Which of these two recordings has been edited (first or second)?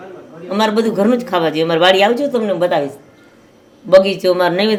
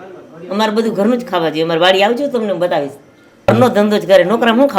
second